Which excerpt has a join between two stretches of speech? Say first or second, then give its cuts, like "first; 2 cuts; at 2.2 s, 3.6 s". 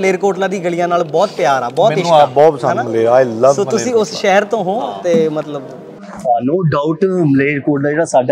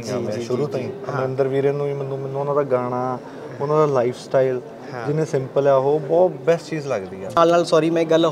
second; 1 cut; at 7.4 s